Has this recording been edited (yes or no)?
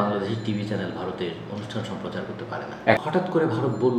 yes